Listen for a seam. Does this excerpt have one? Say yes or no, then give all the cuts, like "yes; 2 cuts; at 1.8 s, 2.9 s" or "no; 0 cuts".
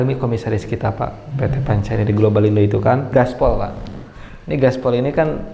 yes; 1 cut; at 3.1 s